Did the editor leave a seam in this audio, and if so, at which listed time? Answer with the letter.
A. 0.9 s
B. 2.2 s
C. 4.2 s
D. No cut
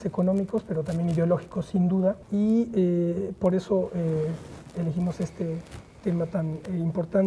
D